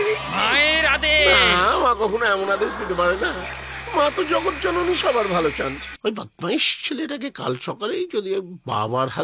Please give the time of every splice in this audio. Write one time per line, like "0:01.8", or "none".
0:05.8